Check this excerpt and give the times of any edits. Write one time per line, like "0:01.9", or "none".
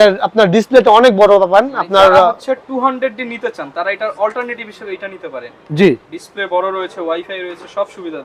none